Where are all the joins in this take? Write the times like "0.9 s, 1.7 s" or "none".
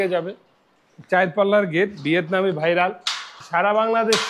3.3 s